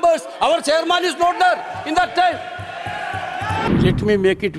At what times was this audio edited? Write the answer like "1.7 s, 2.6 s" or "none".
3.7 s